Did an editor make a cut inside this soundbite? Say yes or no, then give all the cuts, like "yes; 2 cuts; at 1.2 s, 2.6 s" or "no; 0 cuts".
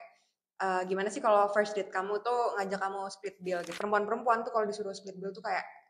yes; 1 cut; at 3.8 s